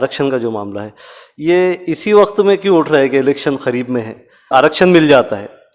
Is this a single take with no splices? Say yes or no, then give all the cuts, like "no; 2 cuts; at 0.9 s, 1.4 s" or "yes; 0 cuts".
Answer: no; 1 cut; at 4.5 s